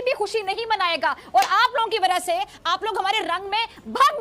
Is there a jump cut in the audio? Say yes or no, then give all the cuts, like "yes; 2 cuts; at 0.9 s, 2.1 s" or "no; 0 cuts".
no; 0 cuts